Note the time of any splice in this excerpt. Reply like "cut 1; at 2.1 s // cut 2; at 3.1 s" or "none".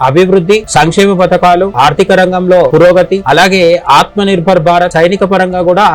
cut 1; at 4.9 s